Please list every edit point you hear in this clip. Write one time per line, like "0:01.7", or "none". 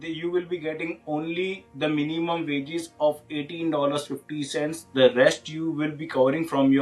none

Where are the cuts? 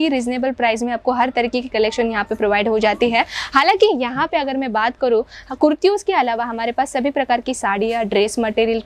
none

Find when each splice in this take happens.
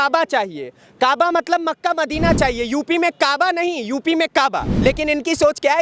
0:04.7

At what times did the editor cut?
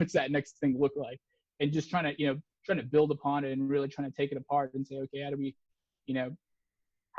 none

